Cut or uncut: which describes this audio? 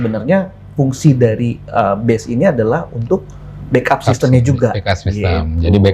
uncut